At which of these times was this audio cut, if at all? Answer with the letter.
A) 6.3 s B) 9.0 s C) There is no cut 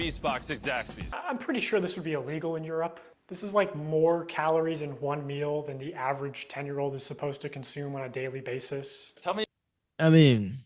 C